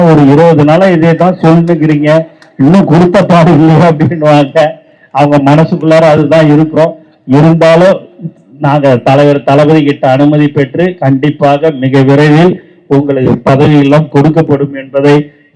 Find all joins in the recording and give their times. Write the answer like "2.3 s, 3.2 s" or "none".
none